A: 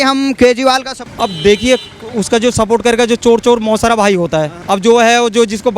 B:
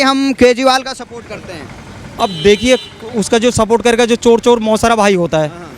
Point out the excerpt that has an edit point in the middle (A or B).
A